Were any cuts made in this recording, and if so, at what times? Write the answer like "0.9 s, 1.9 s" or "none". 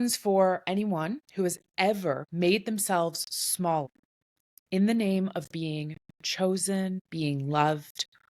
1.2 s, 2.3 s, 3.9 s